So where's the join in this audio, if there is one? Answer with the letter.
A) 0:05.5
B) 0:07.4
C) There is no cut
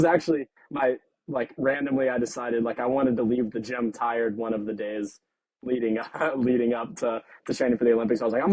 C